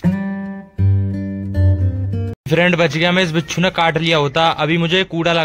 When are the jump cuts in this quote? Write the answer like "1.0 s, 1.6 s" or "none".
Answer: 2.3 s

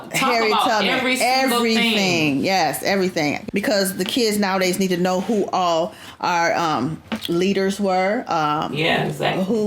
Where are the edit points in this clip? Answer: 3.4 s

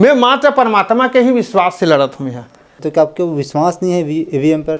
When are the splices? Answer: 2.8 s

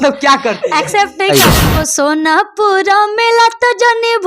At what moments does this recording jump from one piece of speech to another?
1.7 s

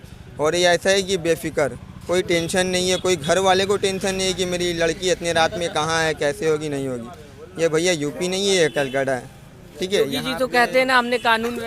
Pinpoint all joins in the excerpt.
none

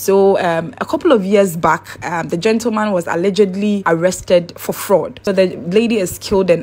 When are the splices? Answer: 5.2 s

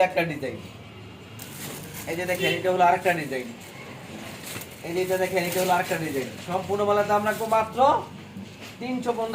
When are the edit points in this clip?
none

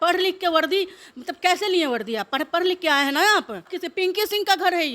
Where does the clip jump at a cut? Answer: 3.8 s

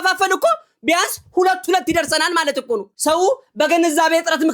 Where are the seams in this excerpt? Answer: 2.9 s

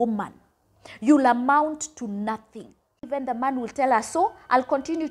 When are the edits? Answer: 3.0 s

